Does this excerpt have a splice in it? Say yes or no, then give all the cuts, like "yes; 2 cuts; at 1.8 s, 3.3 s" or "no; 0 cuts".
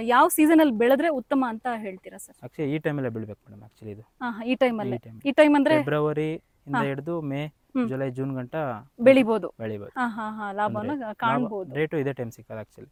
no; 0 cuts